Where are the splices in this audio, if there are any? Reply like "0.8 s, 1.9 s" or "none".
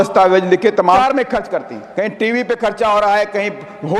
1.0 s